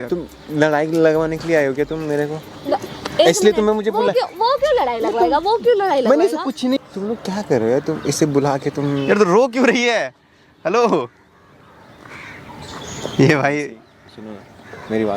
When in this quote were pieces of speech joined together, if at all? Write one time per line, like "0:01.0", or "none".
0:06.8